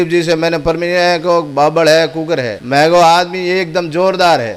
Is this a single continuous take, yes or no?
no